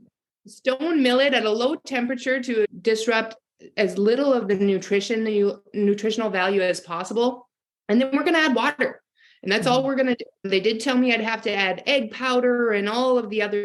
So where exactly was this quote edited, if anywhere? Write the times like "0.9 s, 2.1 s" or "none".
2.7 s, 10.5 s

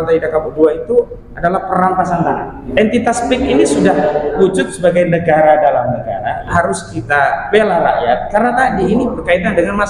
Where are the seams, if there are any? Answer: 2.6 s, 6.4 s

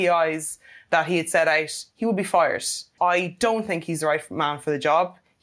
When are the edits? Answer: 2.9 s

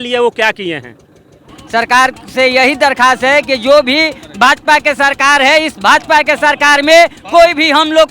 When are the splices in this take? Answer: 1.5 s

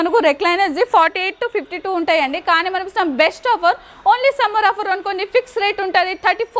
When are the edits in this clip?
none

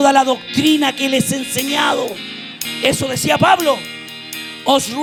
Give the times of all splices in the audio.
none

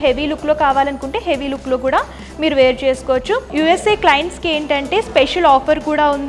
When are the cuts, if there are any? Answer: 3.5 s

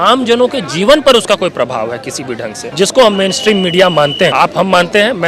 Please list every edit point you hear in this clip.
2.6 s, 4.3 s

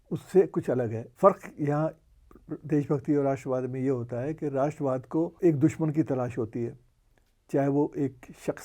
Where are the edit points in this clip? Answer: 1.0 s, 5.3 s

